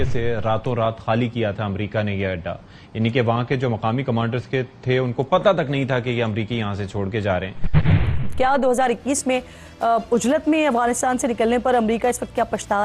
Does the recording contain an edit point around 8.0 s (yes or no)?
yes